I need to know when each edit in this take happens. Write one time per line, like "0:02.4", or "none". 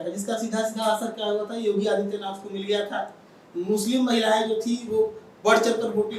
none